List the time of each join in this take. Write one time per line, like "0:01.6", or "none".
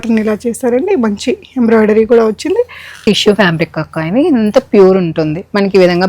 0:03.0

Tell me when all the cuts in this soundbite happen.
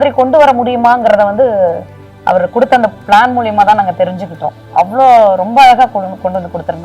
none

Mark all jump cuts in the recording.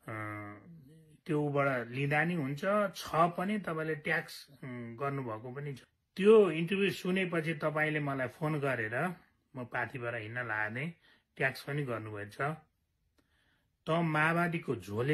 0:05.8

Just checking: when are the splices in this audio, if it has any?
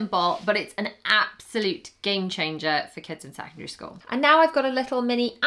0:04.0

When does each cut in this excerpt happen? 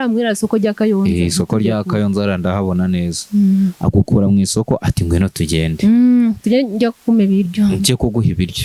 none

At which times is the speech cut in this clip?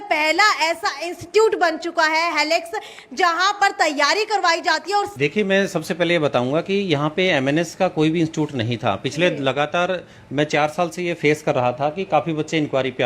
0:05.1

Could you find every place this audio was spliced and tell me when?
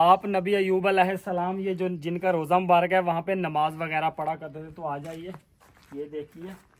none

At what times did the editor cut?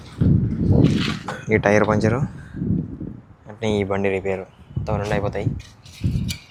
none

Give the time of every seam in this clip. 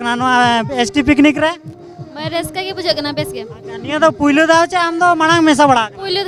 none

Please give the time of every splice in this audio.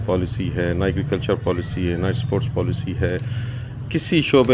none

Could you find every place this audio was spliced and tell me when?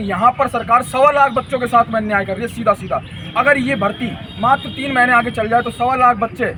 none

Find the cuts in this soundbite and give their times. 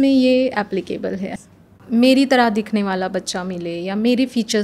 0:01.7

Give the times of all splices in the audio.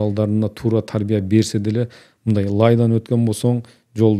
none

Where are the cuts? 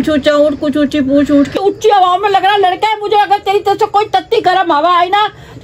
0:01.6

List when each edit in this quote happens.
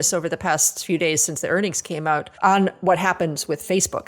0:02.3

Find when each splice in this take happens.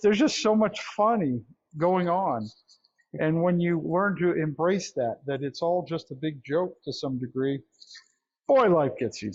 none

